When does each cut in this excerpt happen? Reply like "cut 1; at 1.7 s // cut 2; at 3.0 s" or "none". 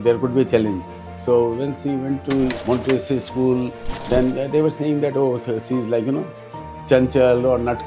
cut 1; at 2.6 s